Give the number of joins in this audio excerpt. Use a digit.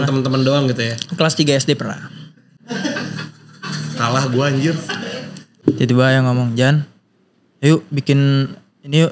1